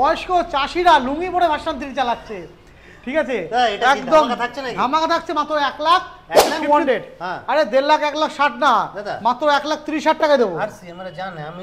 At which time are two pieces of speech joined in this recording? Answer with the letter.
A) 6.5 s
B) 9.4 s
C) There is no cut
A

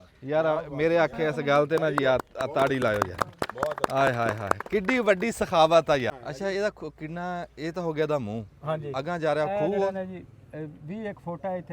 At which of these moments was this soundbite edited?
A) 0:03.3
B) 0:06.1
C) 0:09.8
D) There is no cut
B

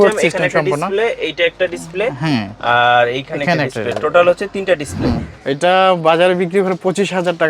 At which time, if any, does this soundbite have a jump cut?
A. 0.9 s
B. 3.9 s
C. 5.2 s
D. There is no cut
C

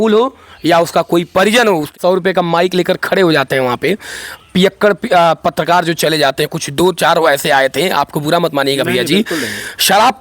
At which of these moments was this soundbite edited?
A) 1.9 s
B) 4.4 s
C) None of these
A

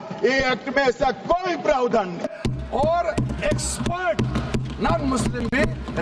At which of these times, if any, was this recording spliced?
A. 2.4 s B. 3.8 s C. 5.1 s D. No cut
A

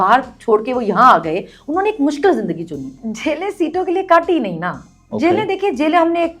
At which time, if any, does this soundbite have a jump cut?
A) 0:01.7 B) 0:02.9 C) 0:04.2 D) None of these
B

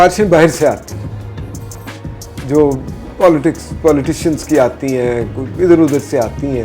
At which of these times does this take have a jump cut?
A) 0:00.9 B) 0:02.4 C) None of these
C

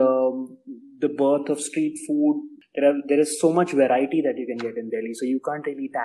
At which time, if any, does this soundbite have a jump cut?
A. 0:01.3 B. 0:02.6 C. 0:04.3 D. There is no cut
B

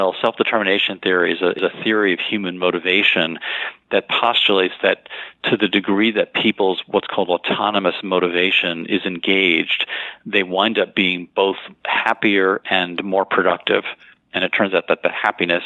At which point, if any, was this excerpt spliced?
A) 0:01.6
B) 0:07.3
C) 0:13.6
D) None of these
A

